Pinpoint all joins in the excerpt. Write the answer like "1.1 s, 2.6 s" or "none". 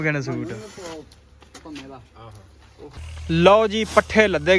3.0 s